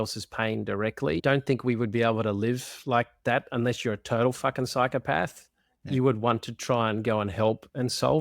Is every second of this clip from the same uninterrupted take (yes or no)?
no